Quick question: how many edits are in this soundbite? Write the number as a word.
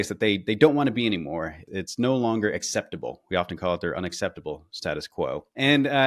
one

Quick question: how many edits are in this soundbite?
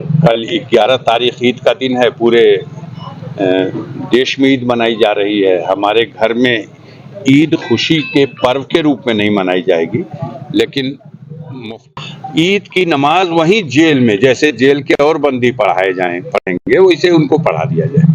one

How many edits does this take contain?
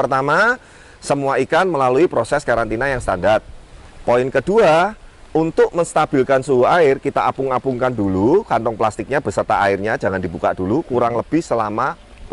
zero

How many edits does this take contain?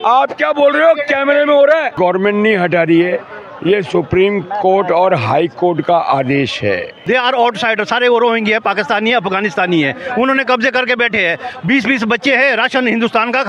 two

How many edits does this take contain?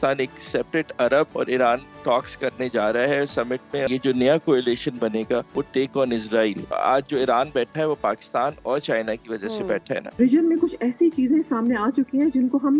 five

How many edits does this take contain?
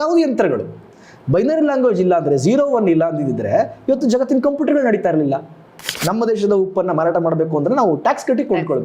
one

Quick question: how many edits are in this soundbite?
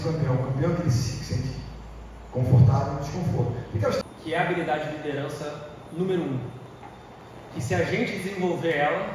one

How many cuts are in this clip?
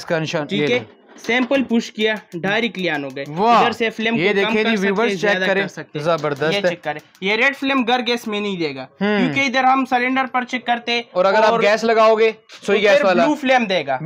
zero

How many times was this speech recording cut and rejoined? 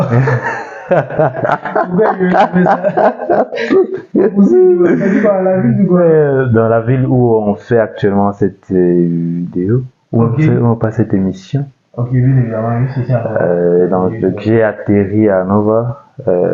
zero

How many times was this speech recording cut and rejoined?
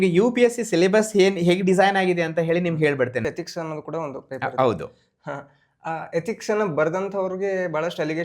one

